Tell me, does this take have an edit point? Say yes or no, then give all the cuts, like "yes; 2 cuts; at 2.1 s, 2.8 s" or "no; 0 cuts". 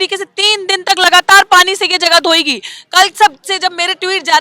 no; 0 cuts